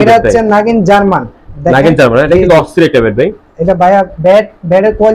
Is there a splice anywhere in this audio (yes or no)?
no